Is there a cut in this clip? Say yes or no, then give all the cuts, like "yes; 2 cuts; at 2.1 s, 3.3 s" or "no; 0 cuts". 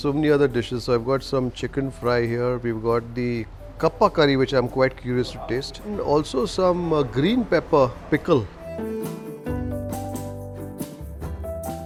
no; 0 cuts